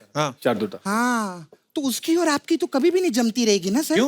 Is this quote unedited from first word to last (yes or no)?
yes